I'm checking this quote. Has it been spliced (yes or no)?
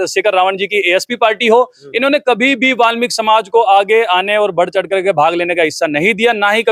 no